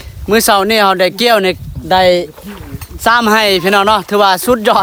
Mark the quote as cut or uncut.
uncut